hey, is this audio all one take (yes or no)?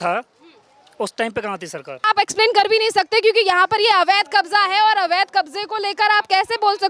no